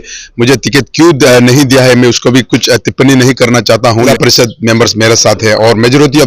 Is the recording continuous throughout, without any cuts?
no; 1 cut; at 4.1 s

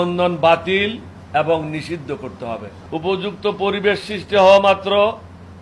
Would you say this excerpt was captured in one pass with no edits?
no; 1 cut; at 2.8 s

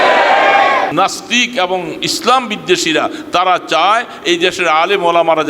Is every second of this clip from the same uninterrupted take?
no; 1 cut; at 0.9 s

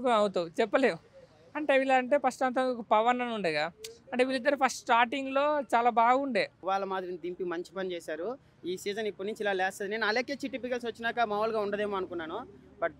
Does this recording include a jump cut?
yes; 1 cut; at 6.6 s

